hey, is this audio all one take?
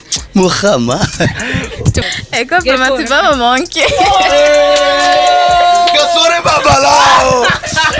no; 1 cut; at 2.0 s

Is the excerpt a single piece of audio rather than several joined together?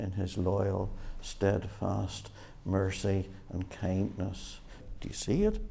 no; 1 cut; at 4.8 s

